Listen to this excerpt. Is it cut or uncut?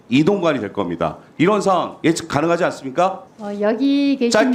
uncut